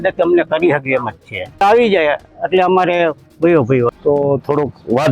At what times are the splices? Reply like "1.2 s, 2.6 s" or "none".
1.6 s, 3.9 s